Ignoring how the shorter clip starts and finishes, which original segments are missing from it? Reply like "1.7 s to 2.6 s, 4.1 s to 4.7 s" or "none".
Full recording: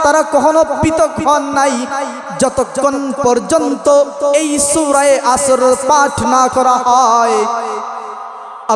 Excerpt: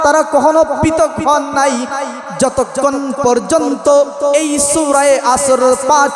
none